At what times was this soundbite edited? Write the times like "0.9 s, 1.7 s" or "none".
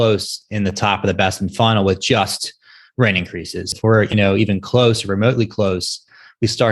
3.7 s